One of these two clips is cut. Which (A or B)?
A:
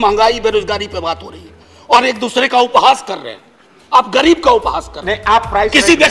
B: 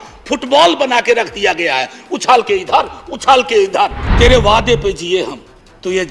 B